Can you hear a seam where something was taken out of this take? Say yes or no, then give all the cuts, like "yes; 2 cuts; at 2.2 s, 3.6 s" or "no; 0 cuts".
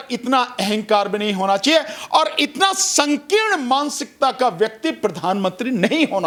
no; 0 cuts